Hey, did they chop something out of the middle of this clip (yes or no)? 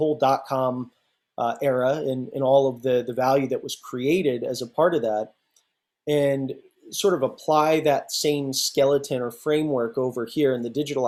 no